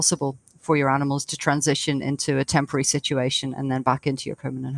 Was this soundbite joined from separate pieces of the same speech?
no; 0 cuts

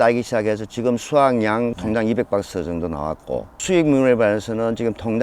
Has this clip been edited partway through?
yes; 1 cut; at 1.8 s

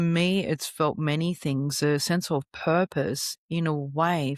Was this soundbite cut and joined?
no; 0 cuts

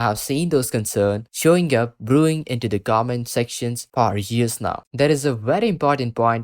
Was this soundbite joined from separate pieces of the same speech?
yes; 1 cut; at 4.8 s

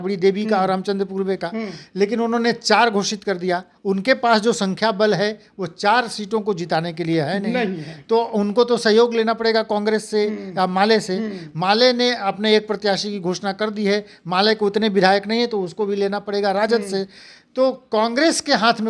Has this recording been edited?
no; 0 cuts

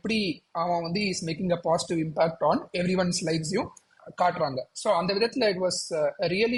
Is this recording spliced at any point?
no; 0 cuts

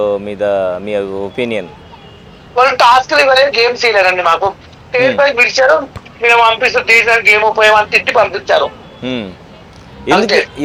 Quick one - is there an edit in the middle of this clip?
no; 0 cuts

